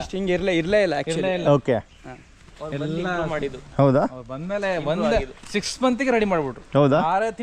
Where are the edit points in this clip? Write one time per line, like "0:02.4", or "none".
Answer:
none